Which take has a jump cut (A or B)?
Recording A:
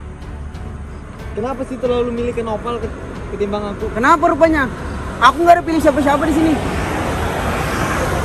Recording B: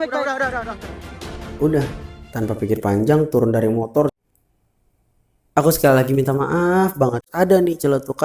B